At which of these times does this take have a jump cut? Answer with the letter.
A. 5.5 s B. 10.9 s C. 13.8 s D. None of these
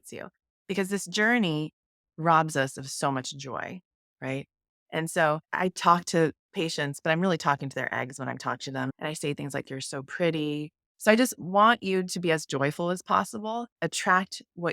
A